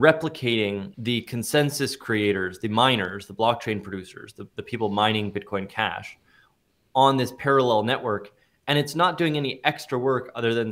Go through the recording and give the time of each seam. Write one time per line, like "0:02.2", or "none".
0:00.9